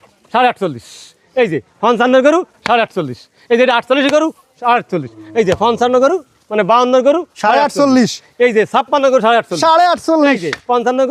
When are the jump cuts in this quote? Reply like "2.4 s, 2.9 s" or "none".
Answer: none

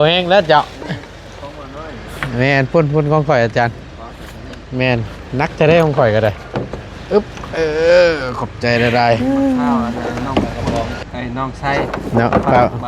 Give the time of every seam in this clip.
9.2 s

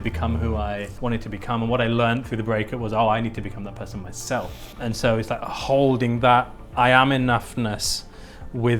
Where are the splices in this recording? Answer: 0.9 s, 4.8 s

